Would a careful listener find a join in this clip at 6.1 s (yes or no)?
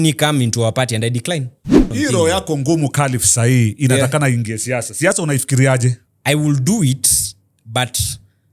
yes